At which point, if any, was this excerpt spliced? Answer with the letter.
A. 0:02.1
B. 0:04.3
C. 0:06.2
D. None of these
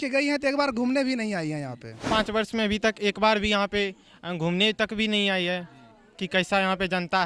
A